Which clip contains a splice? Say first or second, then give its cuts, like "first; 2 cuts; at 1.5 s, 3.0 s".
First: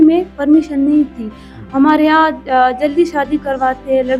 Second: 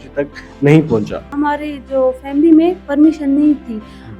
second; 1 cut; at 1.3 s